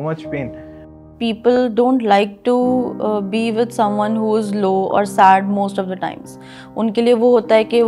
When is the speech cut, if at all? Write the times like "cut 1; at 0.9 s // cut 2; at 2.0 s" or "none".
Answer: cut 1; at 1.2 s